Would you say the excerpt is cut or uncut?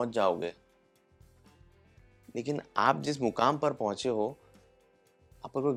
uncut